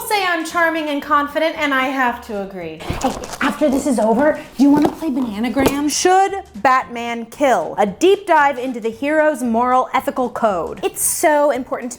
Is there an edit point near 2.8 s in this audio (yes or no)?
yes